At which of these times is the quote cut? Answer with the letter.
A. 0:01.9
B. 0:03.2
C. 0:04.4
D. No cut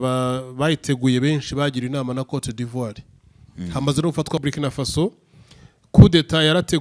C